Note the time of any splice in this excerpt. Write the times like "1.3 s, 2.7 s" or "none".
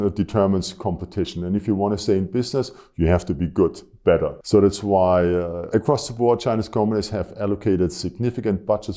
4.4 s, 5.6 s